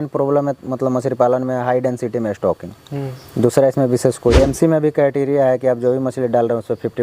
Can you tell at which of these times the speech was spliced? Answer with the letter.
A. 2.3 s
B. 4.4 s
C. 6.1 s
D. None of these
B